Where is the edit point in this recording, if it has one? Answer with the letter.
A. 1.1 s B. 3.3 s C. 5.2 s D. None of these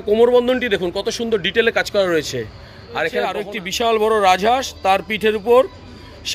B